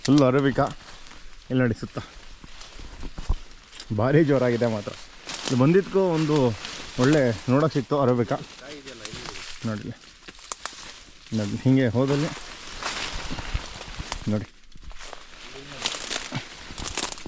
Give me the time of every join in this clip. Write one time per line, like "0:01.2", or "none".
none